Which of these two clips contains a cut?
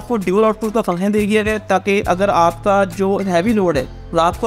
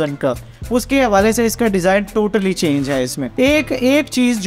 second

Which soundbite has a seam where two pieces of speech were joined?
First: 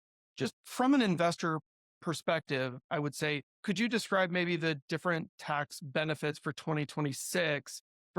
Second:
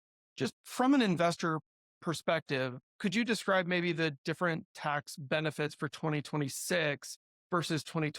second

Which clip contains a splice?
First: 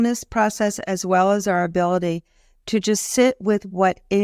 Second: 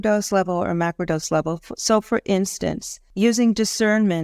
second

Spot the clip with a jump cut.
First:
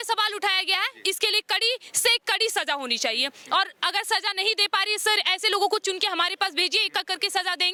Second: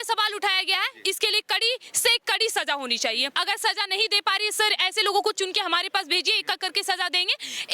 second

